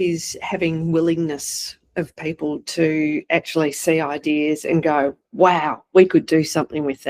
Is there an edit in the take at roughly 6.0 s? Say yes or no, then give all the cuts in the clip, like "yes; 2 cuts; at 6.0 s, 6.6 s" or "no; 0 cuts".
no; 0 cuts